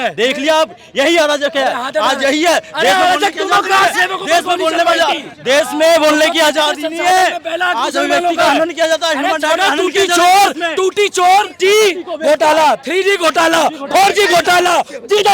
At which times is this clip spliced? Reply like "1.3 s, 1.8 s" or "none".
11.5 s